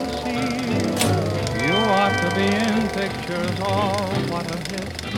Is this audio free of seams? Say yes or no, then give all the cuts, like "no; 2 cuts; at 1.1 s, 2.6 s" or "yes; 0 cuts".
yes; 0 cuts